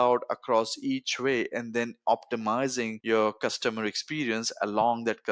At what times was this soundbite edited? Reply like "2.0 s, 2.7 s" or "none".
3.0 s